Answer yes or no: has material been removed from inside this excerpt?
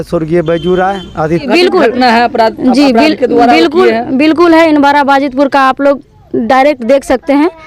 yes